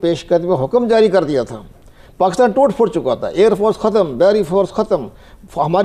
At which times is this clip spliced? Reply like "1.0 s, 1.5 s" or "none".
none